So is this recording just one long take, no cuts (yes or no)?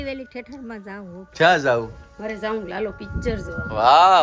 no